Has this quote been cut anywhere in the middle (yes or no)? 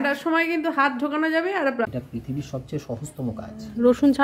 yes